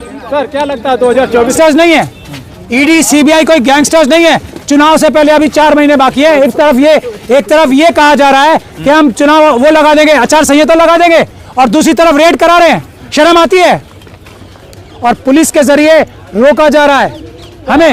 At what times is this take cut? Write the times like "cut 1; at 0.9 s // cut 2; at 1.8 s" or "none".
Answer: cut 1; at 1.5 s // cut 2; at 14.6 s